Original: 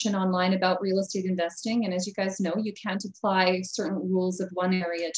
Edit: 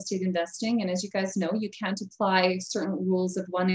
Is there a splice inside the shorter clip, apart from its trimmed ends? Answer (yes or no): no